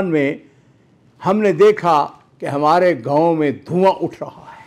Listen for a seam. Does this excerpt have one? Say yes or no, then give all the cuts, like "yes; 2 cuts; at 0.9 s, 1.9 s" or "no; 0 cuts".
no; 0 cuts